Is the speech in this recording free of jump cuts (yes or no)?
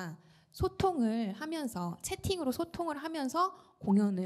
yes